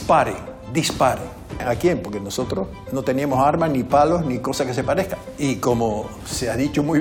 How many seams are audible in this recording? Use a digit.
1